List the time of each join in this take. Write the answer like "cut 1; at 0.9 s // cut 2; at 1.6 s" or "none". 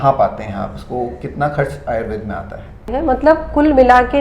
cut 1; at 2.8 s